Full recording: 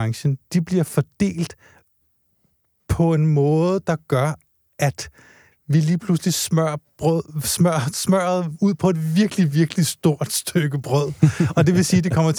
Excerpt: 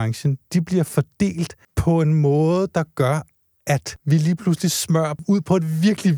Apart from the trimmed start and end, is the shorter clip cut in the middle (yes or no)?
yes